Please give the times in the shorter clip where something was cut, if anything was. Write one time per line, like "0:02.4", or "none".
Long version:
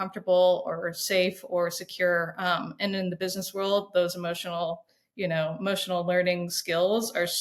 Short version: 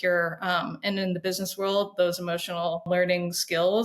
0:02.9

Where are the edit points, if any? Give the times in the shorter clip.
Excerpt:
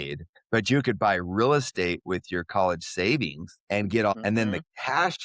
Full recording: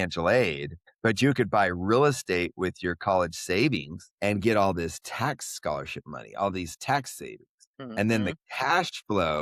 0:04.1

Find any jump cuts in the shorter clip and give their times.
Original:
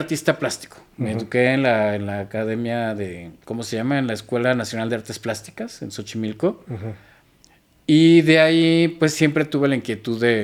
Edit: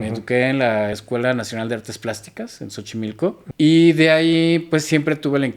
0:01.0
0:03.4

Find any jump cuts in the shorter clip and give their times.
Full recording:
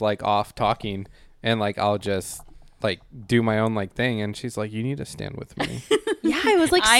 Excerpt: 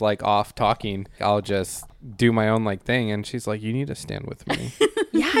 0:01.2
0:02.0

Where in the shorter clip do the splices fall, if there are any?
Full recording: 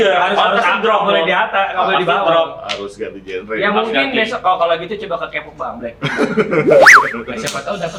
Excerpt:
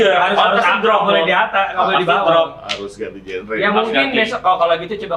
none

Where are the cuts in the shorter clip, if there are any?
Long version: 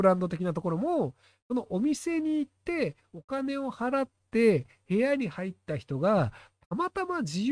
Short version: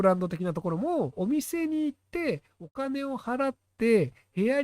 0:01.1

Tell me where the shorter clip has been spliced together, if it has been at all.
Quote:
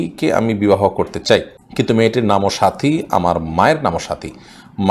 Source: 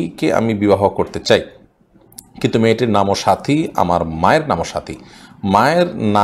0:01.6

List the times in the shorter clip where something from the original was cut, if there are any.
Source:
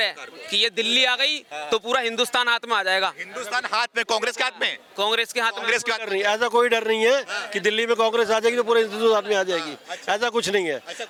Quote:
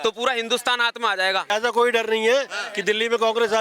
0:01.5

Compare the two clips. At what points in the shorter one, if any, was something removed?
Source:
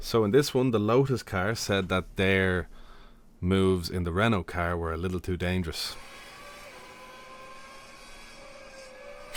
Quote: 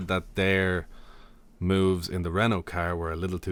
none

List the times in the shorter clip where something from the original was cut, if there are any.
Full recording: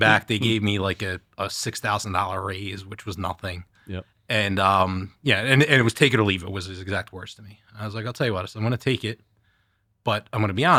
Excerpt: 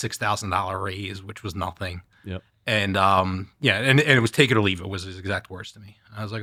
none

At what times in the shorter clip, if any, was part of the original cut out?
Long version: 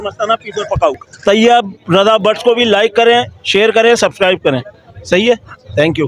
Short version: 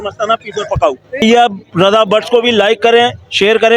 0:01.2

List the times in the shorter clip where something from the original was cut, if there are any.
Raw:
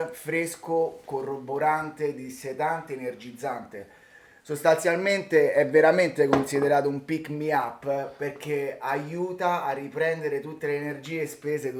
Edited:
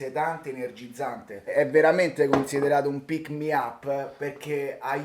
0:01.5

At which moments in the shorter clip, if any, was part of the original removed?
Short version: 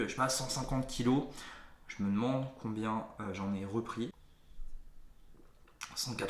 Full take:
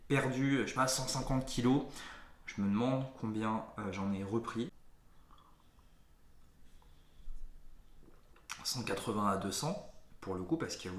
0:04.1

